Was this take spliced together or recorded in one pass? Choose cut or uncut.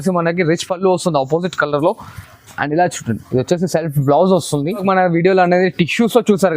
cut